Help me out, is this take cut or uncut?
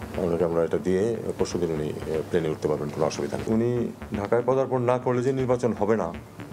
cut